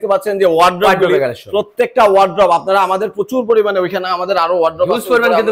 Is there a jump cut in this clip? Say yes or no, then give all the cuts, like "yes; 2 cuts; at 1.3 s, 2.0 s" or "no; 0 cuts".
no; 0 cuts